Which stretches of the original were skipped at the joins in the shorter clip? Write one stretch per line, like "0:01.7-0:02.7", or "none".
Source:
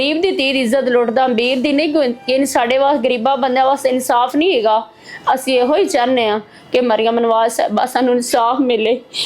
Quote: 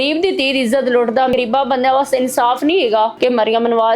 0:01.3-0:03.0
0:04.9-0:06.7